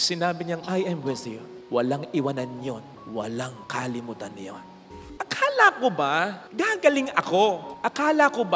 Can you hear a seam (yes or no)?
yes